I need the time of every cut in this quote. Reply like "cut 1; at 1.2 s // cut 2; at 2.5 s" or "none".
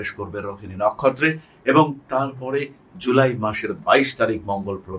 none